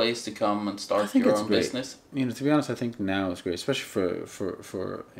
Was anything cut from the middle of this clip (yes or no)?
no